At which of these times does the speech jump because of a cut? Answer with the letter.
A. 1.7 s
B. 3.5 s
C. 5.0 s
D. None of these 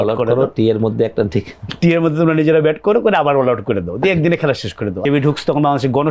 C